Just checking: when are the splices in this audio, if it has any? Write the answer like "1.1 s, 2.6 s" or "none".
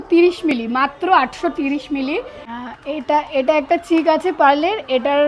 2.4 s

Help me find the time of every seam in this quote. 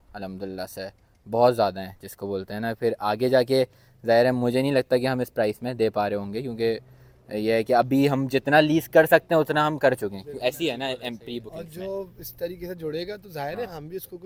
none

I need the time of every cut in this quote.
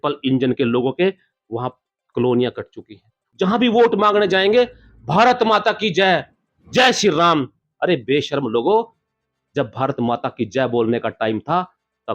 3.2 s

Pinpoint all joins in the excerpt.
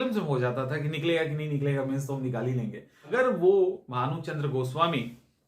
2.9 s

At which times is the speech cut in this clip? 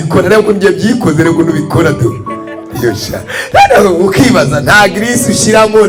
none

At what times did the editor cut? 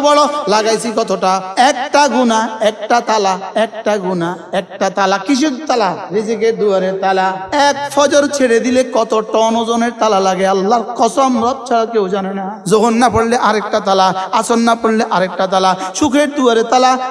1.5 s, 6.0 s, 7.4 s, 12.6 s

